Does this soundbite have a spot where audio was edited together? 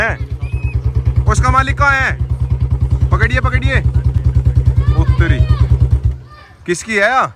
no; 0 cuts

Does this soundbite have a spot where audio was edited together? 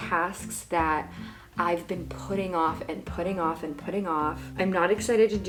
no; 0 cuts

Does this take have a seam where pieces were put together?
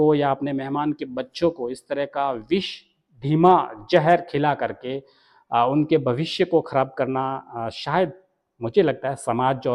no; 0 cuts

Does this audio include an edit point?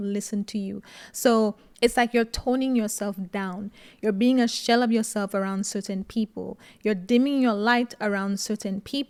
no; 0 cuts

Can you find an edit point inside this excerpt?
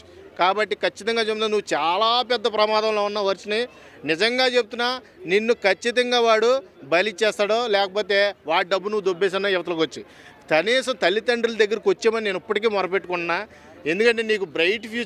no; 0 cuts

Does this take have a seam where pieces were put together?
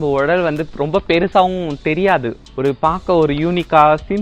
yes; 1 cut; at 2.4 s

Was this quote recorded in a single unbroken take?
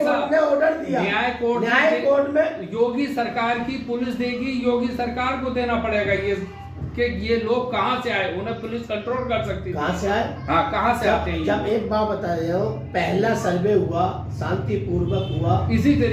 yes; 0 cuts

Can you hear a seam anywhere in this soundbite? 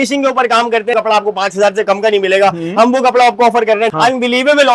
yes; 2 cuts; at 0.9 s, 3.9 s

